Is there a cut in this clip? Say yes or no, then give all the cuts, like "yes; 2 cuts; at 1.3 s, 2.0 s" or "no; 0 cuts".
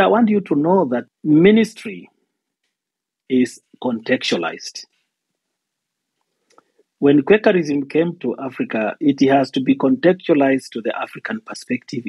yes; 1 cut; at 1.1 s